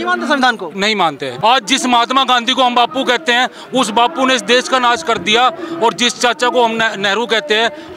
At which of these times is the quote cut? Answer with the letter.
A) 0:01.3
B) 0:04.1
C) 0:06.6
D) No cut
A